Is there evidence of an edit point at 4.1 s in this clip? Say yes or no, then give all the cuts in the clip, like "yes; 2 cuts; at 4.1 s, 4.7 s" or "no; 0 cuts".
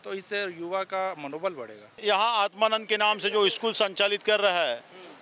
no; 1 cut; at 2.0 s